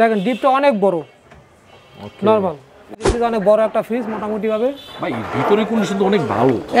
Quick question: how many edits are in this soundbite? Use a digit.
1